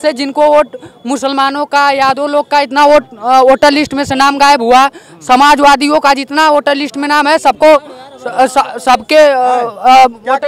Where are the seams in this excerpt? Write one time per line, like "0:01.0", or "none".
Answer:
none